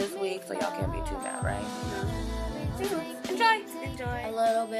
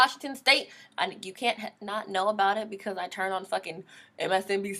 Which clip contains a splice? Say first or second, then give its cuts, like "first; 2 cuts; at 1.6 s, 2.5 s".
first; 1 cut; at 3.6 s